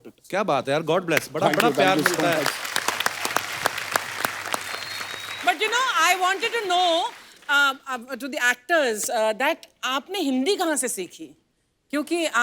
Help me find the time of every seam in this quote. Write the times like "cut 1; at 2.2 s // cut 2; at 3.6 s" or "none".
cut 1; at 5.4 s